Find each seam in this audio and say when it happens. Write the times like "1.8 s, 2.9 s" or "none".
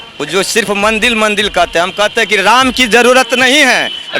none